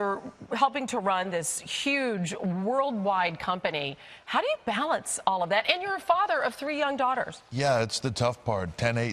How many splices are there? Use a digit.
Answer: 1